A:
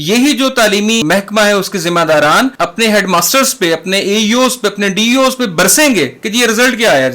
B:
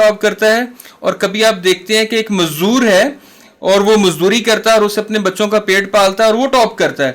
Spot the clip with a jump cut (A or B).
A